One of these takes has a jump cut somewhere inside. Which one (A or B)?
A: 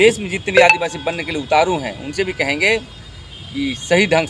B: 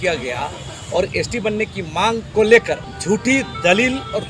B